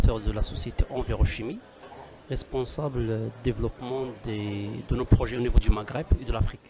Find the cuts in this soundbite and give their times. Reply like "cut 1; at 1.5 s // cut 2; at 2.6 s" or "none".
none